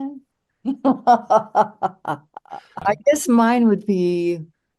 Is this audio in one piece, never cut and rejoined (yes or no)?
no